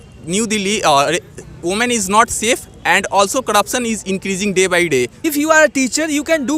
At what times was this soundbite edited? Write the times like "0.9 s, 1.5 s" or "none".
5.2 s